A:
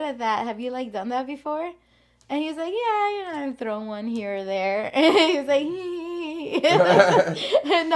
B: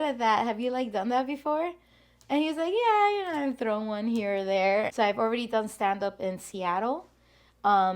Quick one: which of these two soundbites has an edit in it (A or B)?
B